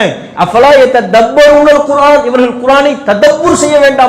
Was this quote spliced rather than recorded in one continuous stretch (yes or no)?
no